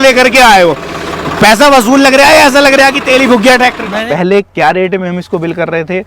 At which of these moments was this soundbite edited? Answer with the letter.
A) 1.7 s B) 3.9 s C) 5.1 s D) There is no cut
B